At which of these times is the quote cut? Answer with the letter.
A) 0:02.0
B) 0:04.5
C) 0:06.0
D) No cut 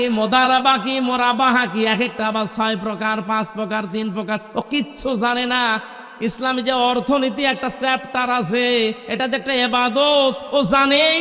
D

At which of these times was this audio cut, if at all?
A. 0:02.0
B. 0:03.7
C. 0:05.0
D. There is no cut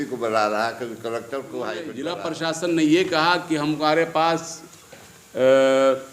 A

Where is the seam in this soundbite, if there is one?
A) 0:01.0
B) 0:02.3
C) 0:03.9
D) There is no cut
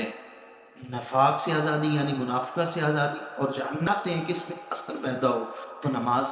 C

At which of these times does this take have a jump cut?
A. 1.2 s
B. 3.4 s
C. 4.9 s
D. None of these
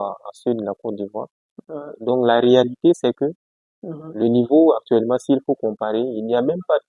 D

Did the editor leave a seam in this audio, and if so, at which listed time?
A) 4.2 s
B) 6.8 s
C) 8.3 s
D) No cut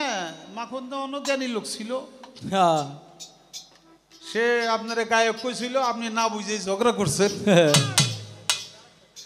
D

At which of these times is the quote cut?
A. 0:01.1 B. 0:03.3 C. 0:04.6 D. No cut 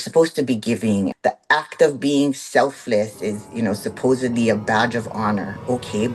A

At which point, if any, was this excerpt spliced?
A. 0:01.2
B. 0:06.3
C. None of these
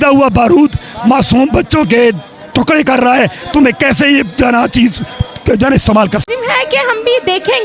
B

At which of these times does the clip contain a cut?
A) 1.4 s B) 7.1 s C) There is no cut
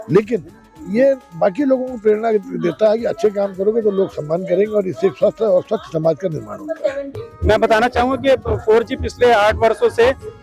B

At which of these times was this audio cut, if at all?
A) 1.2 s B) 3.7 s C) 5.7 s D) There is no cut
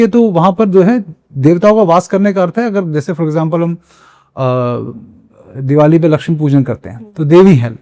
D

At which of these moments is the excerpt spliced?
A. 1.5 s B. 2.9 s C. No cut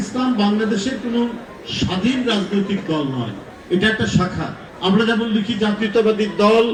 C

